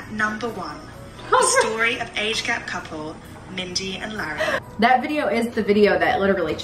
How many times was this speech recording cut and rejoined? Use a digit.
1